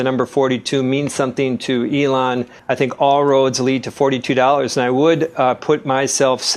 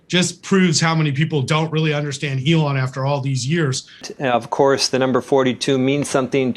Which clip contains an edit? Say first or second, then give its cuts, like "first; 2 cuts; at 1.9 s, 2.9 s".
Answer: second; 1 cut; at 4.0 s